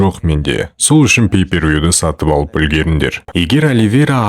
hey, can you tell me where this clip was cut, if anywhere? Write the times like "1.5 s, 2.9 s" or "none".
3.3 s